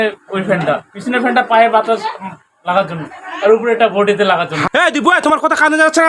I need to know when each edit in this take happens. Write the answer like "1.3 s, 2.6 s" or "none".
4.6 s